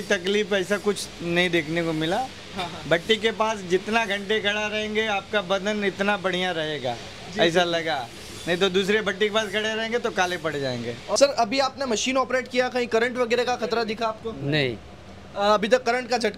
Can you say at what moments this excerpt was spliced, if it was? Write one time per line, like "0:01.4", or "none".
0:11.2